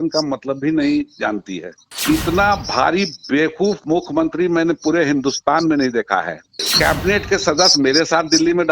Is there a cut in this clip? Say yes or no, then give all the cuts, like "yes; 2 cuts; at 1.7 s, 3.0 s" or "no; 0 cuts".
yes; 2 cuts; at 1.9 s, 6.7 s